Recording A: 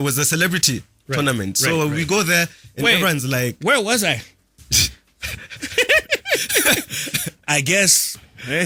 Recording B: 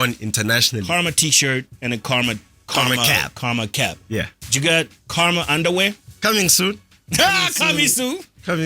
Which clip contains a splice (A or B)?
B